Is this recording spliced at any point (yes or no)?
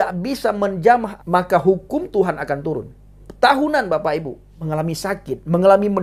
yes